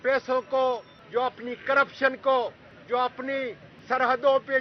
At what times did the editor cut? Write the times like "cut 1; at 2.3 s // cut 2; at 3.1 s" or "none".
cut 1; at 0.9 s // cut 2; at 2.7 s // cut 3; at 3.7 s